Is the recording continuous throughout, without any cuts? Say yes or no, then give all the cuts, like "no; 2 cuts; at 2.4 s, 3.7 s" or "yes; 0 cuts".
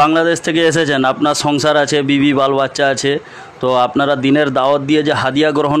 yes; 0 cuts